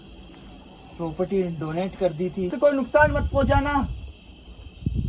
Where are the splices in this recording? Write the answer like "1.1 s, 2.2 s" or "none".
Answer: 2.5 s